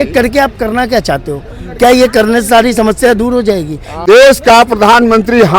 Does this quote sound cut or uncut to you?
cut